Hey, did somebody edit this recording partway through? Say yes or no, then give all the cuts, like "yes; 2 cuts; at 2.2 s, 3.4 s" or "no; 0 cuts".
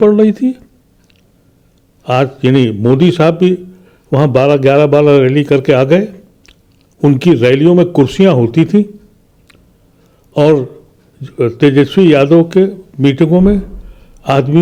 no; 0 cuts